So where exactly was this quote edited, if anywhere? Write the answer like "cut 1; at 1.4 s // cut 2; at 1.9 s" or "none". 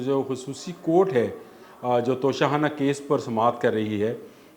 none